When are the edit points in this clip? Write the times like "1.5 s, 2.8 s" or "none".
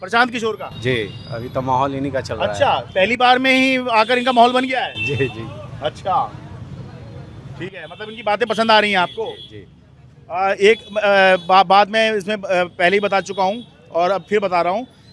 none

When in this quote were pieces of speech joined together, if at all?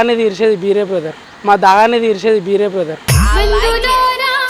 none

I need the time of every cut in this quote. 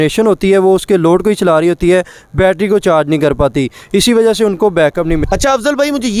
5.2 s

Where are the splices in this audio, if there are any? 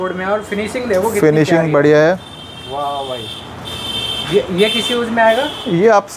none

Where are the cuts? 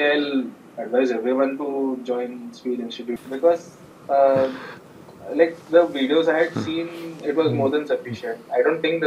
3.2 s

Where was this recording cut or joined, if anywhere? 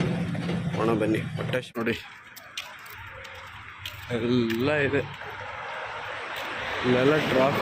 1.6 s

